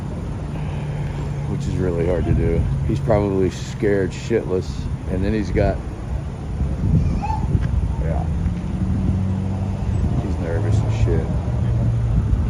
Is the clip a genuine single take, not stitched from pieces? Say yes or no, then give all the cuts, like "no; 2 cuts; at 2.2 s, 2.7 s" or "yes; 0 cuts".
yes; 0 cuts